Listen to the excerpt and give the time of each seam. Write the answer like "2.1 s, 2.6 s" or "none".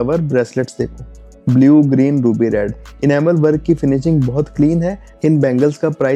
5.0 s